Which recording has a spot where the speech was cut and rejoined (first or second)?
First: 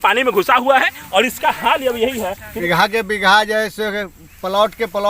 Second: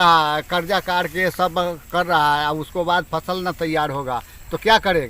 first